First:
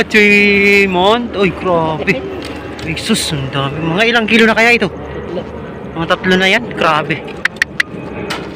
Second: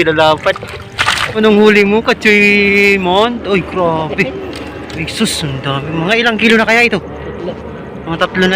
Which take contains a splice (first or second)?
second